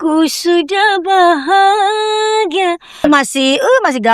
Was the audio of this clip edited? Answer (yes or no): yes